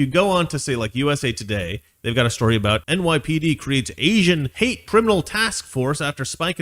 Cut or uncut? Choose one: cut